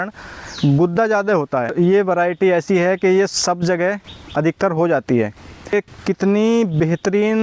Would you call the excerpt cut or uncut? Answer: cut